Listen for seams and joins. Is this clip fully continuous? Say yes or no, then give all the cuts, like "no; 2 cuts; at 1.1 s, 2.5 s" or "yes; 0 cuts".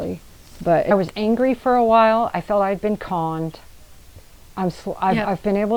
no; 1 cut; at 0.9 s